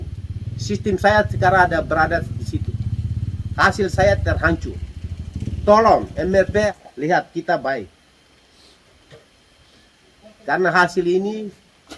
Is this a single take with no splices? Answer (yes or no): no